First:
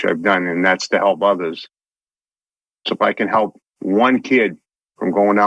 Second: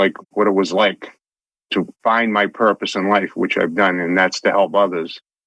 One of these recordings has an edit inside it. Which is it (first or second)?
second